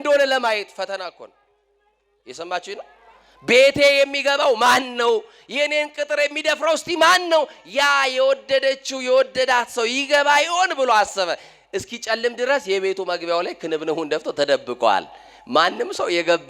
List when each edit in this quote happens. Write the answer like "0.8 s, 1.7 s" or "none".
none